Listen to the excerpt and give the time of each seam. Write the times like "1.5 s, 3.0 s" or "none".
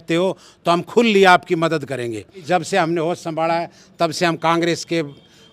2.4 s

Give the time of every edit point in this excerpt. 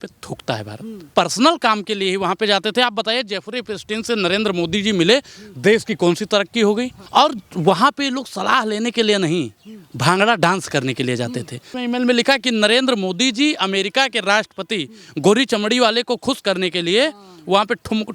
1.1 s, 7.0 s, 11.7 s

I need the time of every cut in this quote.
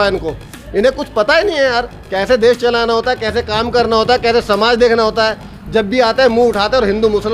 none

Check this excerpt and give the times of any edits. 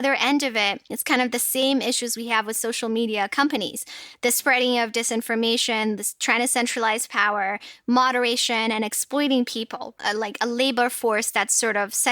0.9 s

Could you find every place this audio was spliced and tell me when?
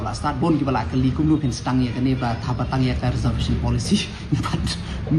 none

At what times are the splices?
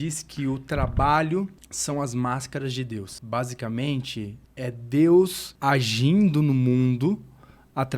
1.7 s, 3.1 s, 4.4 s, 5.5 s

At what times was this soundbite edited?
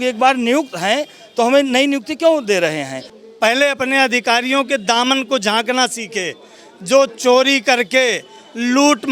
3.2 s

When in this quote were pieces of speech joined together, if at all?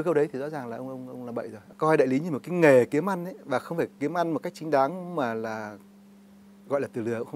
1.6 s

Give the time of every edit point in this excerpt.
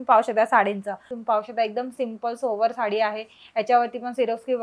1.1 s

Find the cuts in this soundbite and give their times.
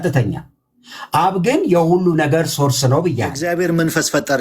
3.4 s

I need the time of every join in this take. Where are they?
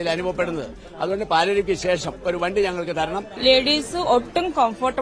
3.3 s

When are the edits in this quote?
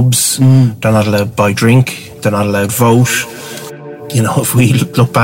3.6 s

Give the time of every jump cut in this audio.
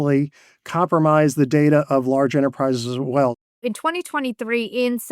3.5 s

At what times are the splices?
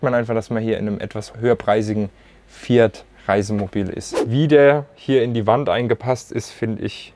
1.3 s, 4.1 s

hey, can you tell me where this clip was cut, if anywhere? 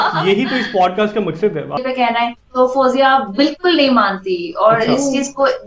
1.8 s

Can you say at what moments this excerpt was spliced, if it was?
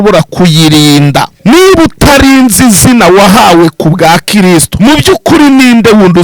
1.3 s, 4.7 s

